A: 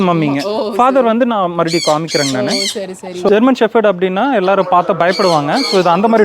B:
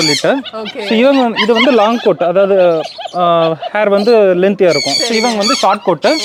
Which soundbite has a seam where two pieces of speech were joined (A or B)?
A